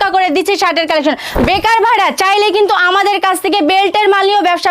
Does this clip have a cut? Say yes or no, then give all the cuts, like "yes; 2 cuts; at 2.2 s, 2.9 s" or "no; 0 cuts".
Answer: yes; 1 cut; at 1.2 s